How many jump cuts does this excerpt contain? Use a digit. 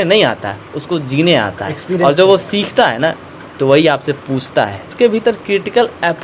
1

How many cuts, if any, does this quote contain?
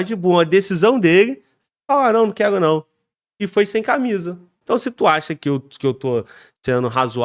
1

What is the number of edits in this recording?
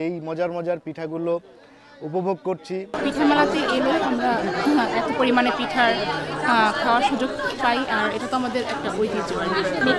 0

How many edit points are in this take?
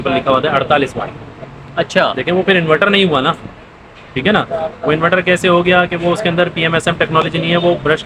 0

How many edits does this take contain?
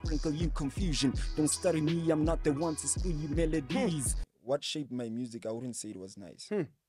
1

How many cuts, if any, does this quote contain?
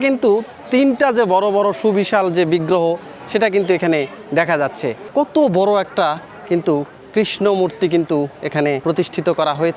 2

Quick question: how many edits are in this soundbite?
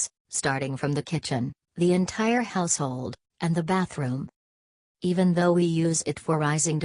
1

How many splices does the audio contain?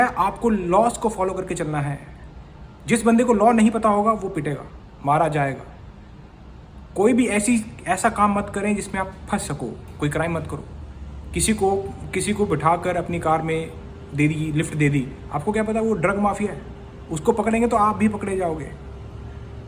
0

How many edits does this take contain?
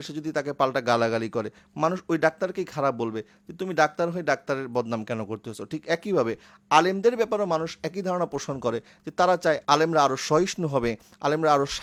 0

